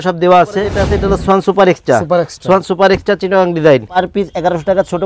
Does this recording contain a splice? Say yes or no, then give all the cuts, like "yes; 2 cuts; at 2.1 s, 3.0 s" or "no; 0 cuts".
yes; 2 cuts; at 0.9 s, 4.0 s